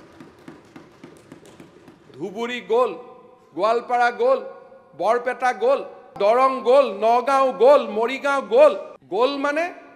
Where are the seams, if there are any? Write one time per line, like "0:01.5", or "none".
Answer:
0:06.1
0:08.9